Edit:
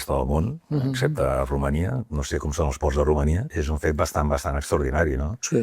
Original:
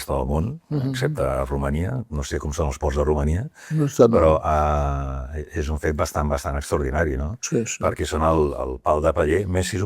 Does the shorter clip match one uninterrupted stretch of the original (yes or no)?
no